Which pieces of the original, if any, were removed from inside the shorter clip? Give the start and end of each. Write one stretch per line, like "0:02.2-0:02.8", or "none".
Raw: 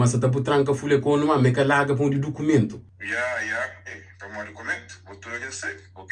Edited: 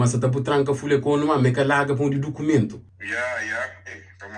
none

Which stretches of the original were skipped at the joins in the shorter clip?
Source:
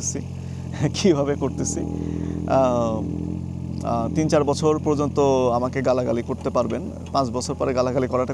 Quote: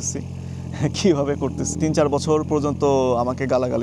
0:01.7-0:04.1

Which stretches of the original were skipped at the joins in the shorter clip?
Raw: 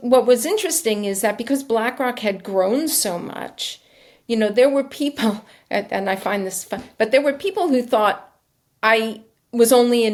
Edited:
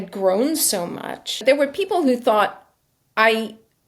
0:03.7-0:07.1

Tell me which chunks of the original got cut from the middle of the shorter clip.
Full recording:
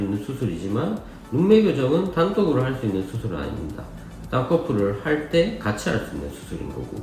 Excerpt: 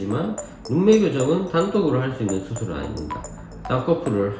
none

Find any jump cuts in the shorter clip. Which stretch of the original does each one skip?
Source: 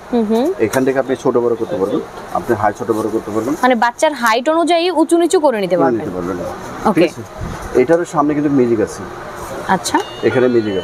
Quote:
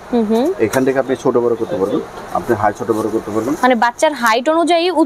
none

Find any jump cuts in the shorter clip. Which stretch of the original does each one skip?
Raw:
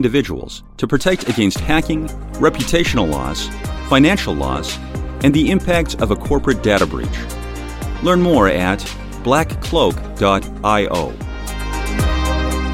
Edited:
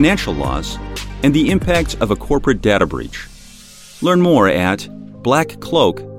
none

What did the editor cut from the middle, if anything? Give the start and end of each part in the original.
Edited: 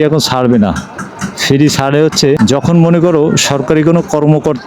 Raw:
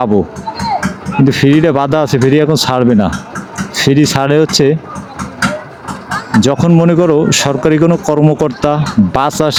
0:04.7-0:06.3

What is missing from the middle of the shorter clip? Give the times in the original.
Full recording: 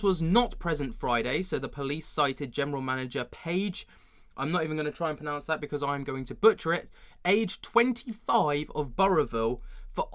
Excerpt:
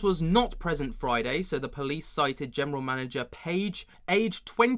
0:03.9-0:07.0

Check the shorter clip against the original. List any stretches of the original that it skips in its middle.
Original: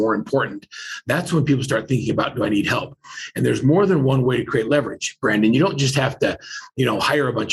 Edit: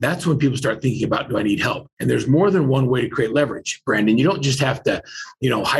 0:02.9-0:03.2

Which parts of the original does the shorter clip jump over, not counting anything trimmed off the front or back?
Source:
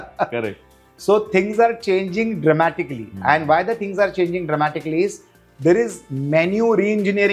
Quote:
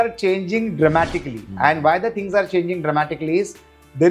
none

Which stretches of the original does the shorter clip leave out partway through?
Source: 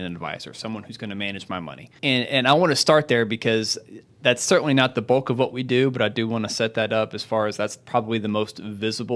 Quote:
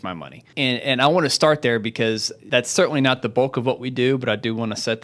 0:03.8-0:04.1

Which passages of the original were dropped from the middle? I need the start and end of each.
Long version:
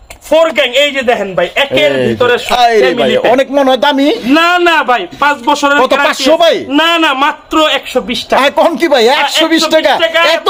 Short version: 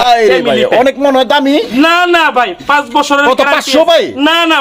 none

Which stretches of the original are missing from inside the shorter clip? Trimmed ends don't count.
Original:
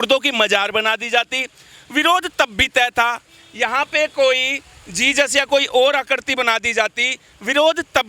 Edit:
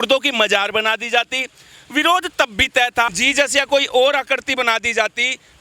0:03.2-0:05.0

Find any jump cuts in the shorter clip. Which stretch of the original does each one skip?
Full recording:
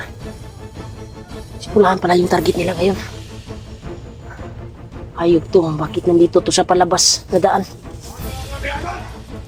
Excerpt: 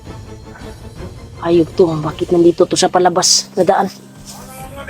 0:01.7-0:04.8

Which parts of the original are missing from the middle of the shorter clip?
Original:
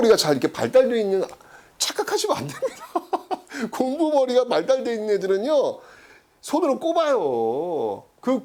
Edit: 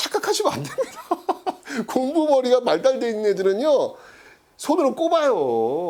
none

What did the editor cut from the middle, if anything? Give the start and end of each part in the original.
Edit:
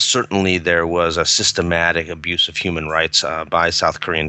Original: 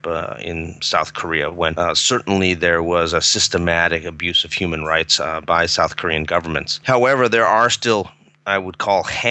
none

